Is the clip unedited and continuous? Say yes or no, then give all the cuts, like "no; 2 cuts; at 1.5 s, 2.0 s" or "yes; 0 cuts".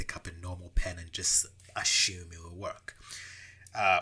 yes; 0 cuts